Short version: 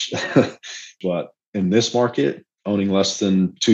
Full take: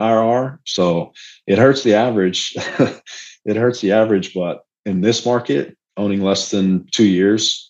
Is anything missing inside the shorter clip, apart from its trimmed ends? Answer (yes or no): yes